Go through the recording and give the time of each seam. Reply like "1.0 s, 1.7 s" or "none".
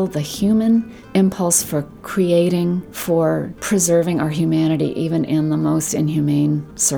1.0 s, 2.9 s, 3.5 s